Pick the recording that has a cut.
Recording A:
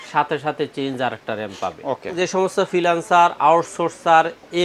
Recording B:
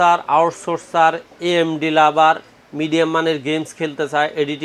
A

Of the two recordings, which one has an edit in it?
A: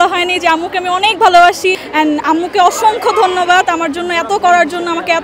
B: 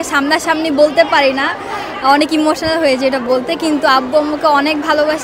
A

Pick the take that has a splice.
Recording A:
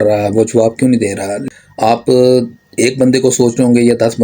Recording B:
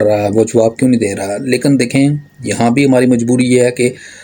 A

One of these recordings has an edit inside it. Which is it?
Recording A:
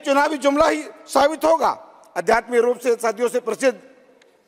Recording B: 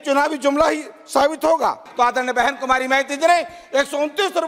B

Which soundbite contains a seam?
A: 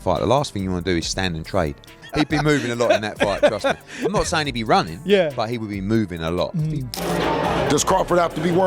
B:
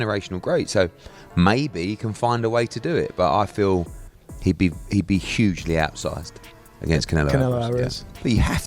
A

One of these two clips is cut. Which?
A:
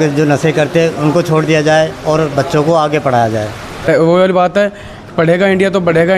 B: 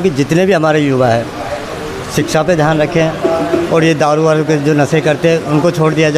A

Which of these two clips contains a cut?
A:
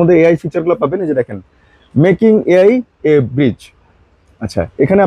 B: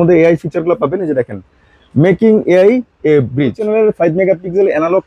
B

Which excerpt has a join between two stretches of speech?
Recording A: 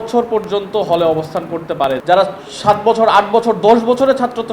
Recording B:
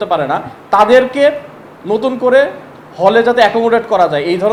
A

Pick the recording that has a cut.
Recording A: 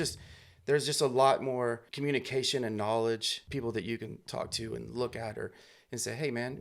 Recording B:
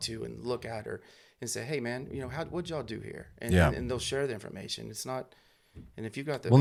A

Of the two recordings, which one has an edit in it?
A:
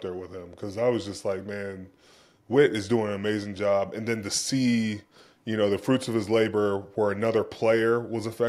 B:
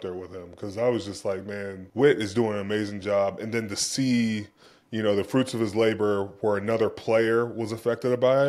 B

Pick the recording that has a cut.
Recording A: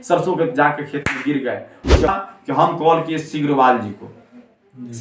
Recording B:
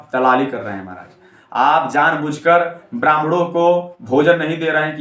A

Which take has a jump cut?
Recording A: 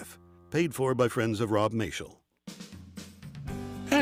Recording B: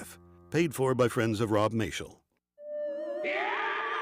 B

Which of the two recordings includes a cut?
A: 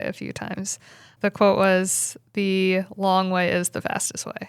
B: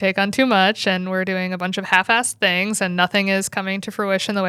A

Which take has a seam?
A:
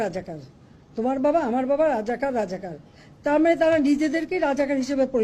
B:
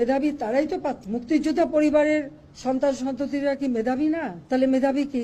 B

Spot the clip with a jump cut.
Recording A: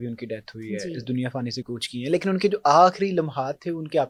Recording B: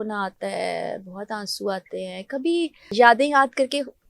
B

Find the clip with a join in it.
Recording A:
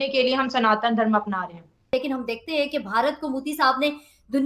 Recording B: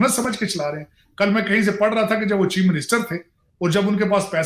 A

